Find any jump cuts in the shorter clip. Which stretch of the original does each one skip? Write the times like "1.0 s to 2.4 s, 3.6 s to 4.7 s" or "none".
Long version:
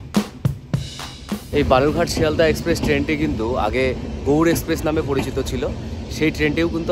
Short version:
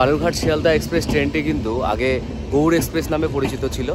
none